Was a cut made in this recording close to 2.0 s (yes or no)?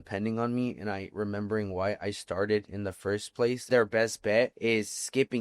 no